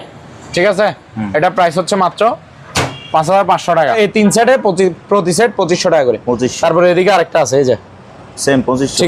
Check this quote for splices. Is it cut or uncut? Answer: cut